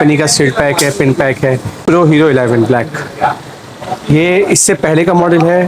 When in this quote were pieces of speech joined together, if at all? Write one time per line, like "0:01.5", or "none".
0:01.8

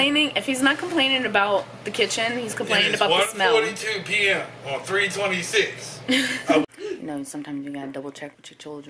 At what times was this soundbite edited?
0:06.6

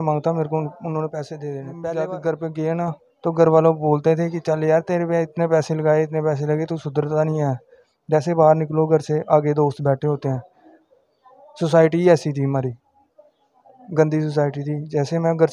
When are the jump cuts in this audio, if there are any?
0:01.7

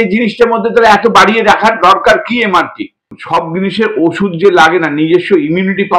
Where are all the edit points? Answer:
0:03.2

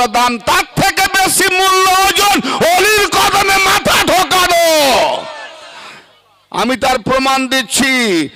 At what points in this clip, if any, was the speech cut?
none

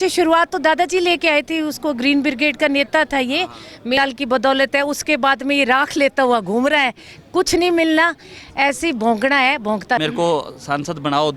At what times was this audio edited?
0:04.0
0:10.0

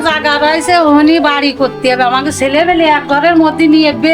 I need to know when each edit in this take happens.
none

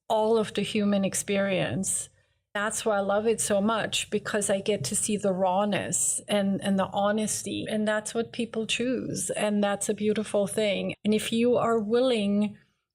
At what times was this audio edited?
0:02.6
0:07.6
0:10.9

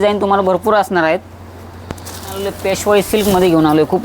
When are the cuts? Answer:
0:02.2

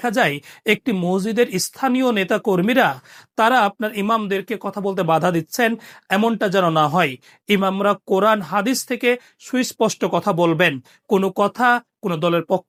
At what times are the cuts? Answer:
none

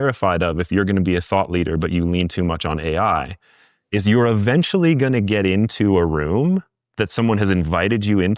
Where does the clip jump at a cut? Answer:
none

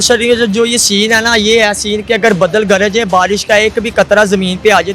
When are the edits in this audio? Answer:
none

